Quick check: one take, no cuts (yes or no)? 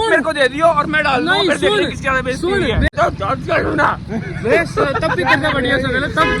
no